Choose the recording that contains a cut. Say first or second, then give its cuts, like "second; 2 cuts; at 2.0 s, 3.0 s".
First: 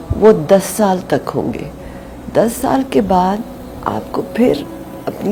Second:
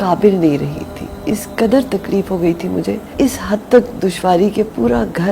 second; 1 cut; at 3.1 s